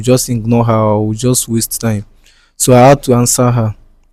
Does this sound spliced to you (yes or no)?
no